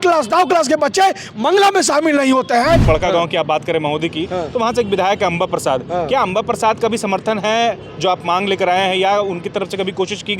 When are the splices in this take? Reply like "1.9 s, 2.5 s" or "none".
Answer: 2.8 s